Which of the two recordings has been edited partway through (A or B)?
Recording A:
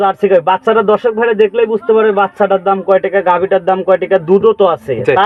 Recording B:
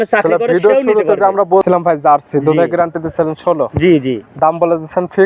B